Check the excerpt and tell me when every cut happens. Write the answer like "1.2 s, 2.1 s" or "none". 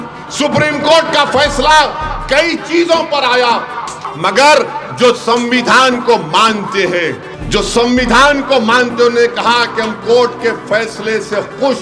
4.0 s, 7.3 s